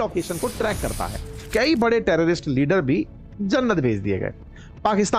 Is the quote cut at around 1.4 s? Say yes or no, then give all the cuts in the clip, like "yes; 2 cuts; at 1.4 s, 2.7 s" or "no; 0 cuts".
yes; 1 cut; at 1.4 s